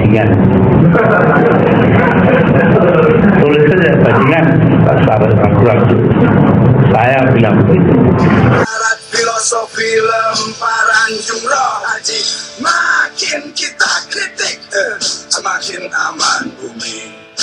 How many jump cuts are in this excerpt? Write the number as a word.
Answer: zero